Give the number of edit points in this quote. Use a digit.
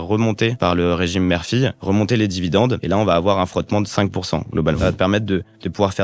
1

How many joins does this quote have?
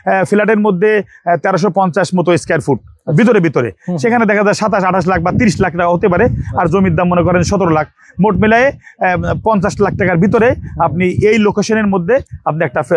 0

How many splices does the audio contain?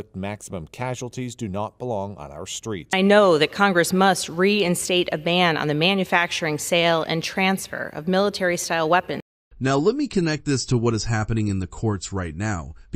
0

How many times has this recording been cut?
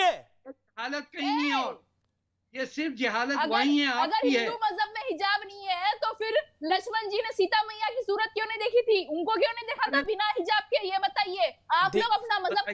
0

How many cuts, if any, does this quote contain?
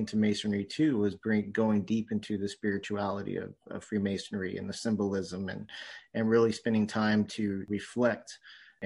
0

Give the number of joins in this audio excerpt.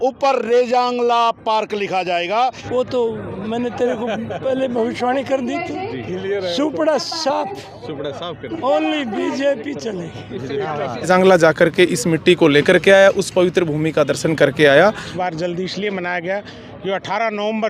3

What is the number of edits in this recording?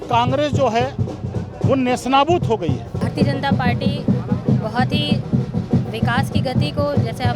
1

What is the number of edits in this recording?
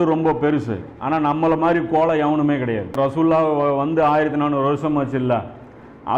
1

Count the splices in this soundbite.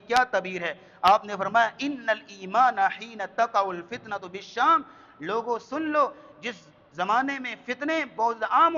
0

